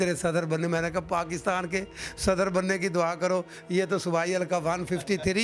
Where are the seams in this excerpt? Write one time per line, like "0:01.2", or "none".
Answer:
none